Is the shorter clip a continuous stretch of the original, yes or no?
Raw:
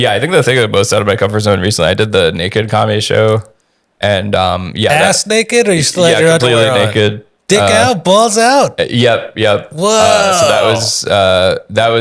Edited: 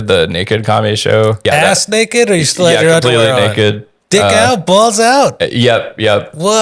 no